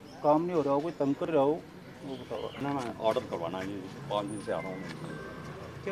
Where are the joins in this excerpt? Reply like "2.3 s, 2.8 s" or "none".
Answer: 2.6 s